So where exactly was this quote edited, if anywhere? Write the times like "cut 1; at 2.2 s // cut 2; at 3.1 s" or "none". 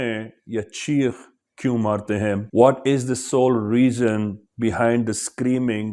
cut 1; at 2.4 s